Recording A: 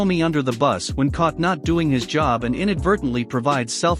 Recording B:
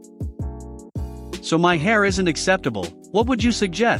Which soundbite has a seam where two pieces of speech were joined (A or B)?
B